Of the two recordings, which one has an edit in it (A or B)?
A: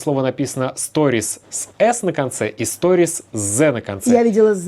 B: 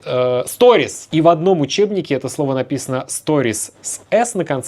B